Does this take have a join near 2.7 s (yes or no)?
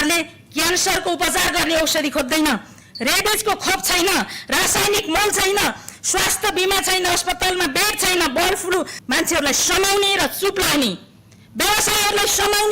no